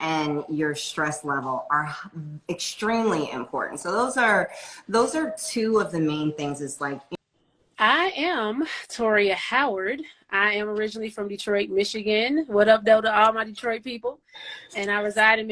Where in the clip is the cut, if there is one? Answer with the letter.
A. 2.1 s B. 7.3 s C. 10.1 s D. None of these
B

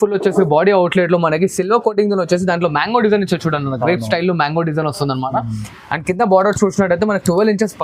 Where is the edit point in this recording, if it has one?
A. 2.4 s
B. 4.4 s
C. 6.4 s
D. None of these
D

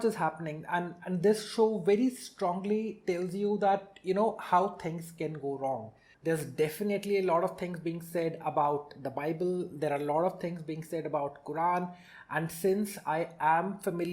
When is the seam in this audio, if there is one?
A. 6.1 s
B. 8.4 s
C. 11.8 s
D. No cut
A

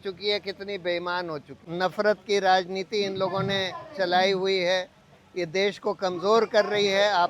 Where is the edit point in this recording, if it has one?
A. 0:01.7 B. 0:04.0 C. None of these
A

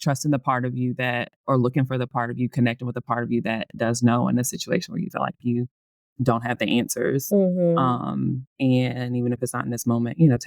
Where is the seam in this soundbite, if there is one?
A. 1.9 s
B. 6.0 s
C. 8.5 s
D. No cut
B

